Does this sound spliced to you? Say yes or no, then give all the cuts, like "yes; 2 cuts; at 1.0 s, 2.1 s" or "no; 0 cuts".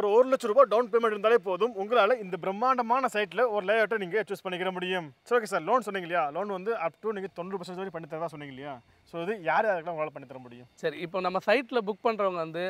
no; 0 cuts